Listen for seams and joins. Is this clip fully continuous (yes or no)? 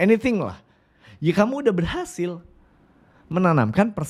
yes